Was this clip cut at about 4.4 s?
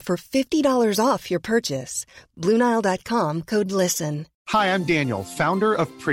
yes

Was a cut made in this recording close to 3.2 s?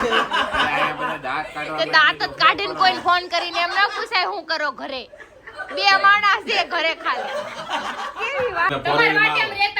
no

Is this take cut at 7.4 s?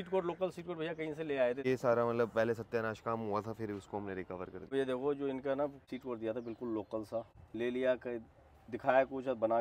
yes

